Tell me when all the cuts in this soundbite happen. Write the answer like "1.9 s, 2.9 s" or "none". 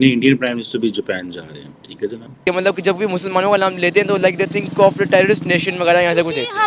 2.4 s